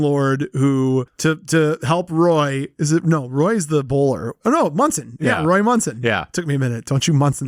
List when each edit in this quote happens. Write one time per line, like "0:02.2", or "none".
none